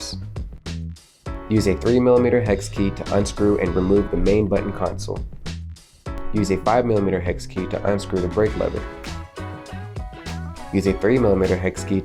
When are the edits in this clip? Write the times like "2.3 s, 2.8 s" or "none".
none